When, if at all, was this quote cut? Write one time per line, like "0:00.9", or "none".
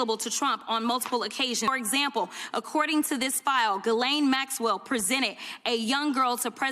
0:01.7